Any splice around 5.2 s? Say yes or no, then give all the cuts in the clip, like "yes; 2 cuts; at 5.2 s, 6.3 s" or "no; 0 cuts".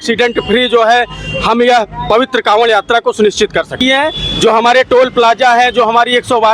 no; 1 cut; at 3.7 s